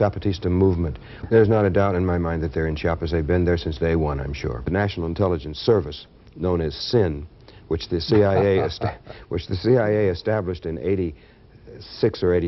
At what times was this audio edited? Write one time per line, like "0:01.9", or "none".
0:01.1
0:04.7